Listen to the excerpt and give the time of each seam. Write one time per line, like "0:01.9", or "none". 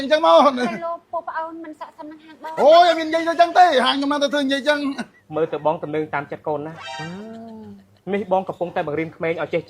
0:05.1